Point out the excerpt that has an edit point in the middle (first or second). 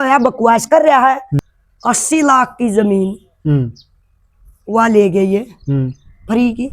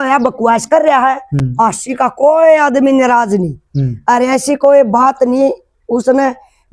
first